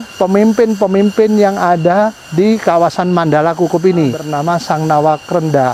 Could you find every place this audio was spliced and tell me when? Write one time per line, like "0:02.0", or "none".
0:02.2
0:04.3